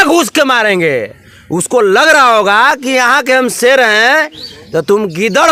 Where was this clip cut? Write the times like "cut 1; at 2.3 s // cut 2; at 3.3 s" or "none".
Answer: none